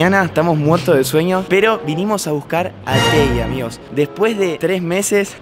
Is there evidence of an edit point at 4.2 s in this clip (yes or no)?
no